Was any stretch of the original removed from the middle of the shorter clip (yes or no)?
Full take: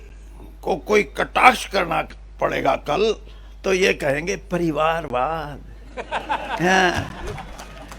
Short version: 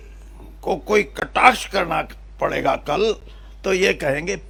no